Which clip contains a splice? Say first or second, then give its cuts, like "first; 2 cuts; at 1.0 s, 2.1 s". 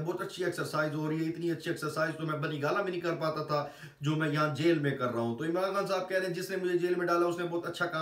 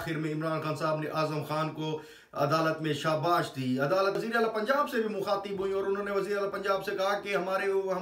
second; 1 cut; at 4.2 s